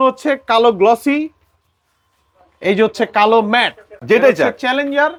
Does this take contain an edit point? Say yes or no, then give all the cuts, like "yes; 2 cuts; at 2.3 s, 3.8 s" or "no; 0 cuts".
no; 0 cuts